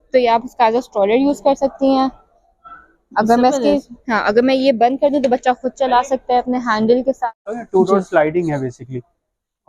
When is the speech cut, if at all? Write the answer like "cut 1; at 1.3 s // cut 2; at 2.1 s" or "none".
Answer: cut 1; at 7.6 s